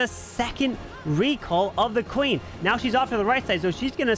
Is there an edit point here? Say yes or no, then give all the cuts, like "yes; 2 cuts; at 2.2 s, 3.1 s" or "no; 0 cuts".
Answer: no; 0 cuts